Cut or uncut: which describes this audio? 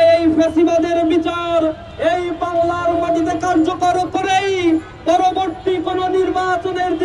uncut